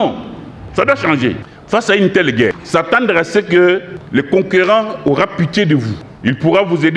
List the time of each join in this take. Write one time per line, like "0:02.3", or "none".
0:01.5
0:02.6
0:03.9
0:06.0

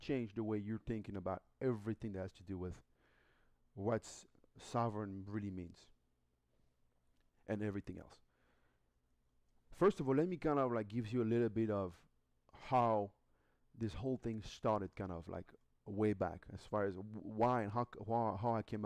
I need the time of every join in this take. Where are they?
0:07.8

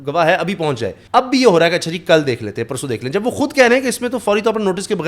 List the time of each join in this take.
0:00.9

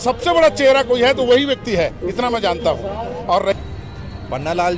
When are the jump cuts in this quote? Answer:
0:03.5

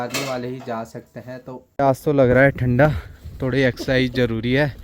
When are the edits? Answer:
0:01.6

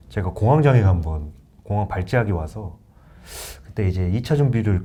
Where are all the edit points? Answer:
none

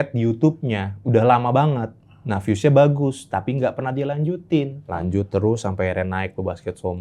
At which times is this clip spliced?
0:04.8

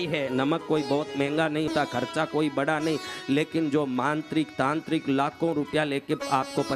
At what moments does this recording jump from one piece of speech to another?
0:01.7

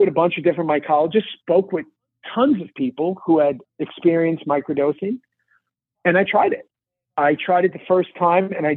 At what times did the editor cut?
none

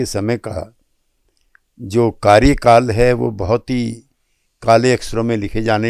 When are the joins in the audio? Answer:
none

